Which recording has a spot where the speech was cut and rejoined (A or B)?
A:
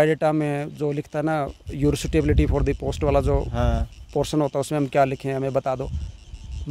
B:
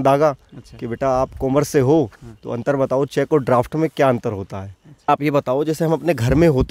B